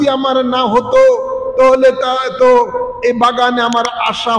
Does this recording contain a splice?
no; 0 cuts

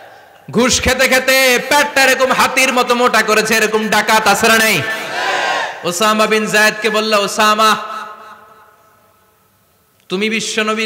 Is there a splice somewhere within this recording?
yes; 1 cut; at 5.7 s

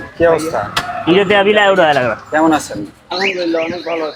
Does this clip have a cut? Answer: no; 0 cuts

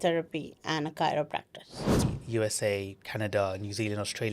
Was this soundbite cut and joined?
yes; 1 cut; at 2.0 s

